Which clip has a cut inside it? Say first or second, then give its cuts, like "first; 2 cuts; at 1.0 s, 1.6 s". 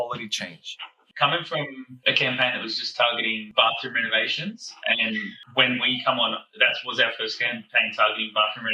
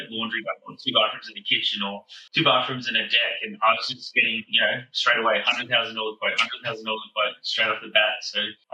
first; 3 cuts; at 1.0 s, 1.9 s, 3.4 s